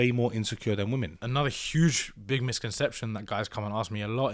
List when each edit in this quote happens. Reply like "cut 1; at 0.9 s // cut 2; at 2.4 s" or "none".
cut 1; at 1.2 s

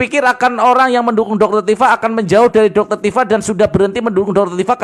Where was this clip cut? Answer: none

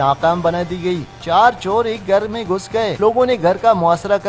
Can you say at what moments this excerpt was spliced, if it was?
cut 1; at 3.0 s

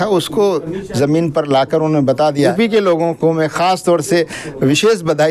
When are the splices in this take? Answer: cut 1; at 2.5 s

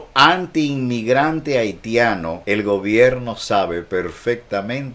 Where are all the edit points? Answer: cut 1; at 2.4 s

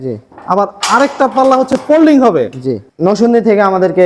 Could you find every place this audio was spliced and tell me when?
cut 1; at 2.8 s

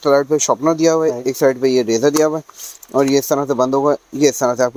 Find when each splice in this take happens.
none

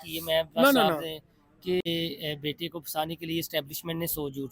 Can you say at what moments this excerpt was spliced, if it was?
cut 1; at 1.8 s

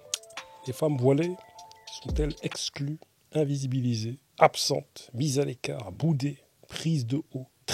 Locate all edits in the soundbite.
none

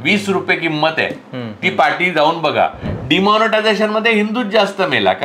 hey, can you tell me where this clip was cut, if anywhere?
cut 1; at 2.8 s

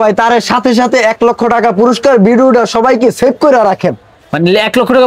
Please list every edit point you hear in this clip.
none

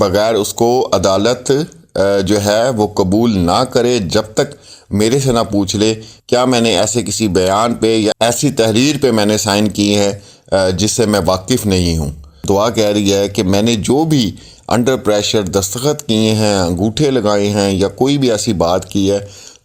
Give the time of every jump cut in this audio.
cut 1; at 12.4 s

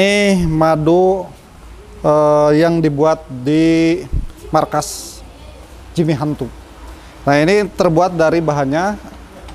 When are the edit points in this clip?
none

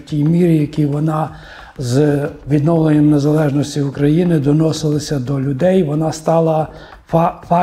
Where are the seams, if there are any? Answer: none

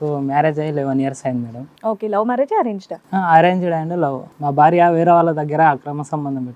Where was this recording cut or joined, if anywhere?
cut 1; at 4.3 s

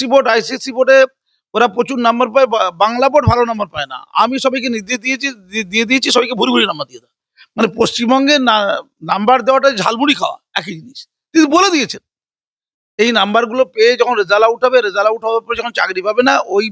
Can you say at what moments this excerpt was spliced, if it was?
none

